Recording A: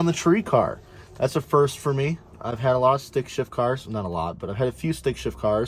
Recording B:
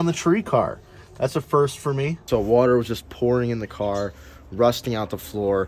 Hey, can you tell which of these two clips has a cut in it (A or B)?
B